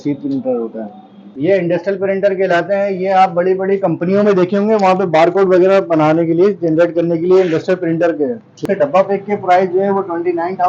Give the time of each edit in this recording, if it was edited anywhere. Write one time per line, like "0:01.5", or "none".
0:01.3
0:08.6